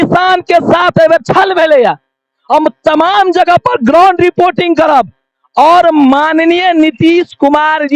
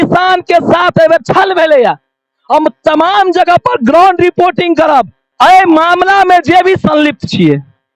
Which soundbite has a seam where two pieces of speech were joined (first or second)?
second